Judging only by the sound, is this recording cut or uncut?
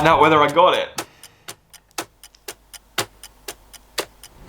cut